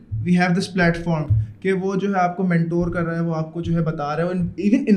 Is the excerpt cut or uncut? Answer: uncut